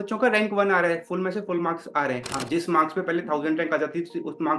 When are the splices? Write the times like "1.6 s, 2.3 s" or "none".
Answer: 2.3 s